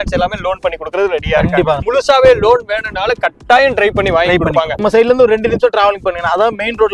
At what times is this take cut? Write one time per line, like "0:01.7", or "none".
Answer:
0:01.8
0:04.7